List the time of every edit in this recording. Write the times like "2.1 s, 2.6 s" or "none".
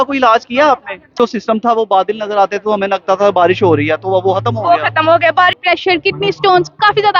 1.2 s, 5.6 s